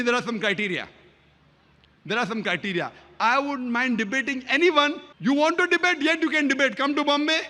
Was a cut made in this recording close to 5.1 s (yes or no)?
yes